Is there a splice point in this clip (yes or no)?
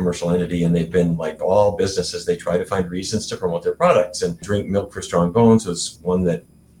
yes